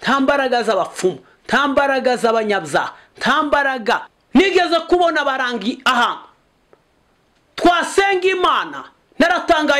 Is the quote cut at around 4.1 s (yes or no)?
yes